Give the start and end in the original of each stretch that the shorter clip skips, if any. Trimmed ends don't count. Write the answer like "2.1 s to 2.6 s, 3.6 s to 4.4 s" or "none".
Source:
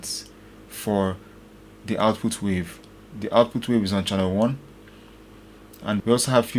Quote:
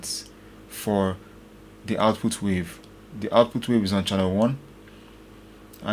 none